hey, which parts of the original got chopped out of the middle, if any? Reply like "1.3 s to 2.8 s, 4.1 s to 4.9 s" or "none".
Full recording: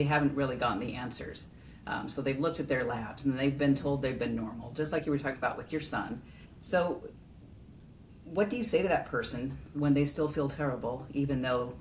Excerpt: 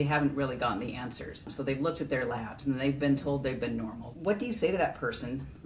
1.5 s to 2.1 s, 4.6 s to 8.1 s